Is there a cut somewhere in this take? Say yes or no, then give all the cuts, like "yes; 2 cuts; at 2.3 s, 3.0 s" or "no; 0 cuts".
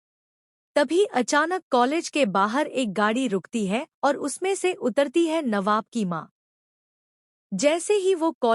yes; 1 cut; at 1.9 s